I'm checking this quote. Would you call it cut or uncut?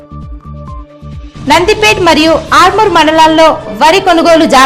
cut